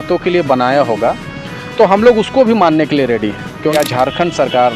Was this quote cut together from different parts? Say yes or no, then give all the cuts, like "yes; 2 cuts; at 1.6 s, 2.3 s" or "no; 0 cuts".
yes; 1 cut; at 3.7 s